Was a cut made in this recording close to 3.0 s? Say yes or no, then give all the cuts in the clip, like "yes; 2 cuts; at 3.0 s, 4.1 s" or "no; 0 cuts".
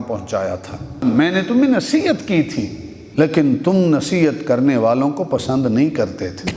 yes; 2 cuts; at 1.0 s, 3.0 s